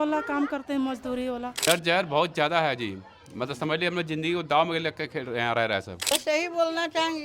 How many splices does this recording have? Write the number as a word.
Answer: two